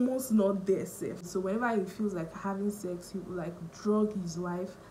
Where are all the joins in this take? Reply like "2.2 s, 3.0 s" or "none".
1.2 s